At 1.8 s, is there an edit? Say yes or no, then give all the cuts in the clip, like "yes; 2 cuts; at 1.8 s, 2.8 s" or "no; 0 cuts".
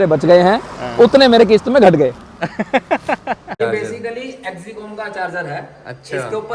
no; 1 cut; at 3.6 s